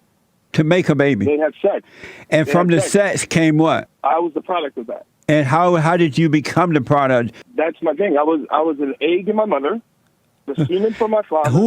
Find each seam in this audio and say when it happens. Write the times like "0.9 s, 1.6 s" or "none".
3.9 s, 7.4 s